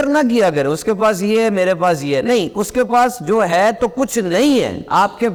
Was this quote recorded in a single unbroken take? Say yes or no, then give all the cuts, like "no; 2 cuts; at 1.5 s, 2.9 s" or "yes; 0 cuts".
yes; 0 cuts